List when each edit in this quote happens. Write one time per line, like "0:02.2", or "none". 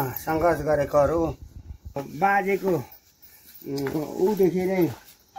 0:02.0